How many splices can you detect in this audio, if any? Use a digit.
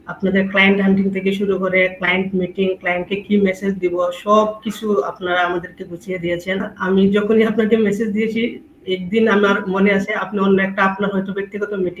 1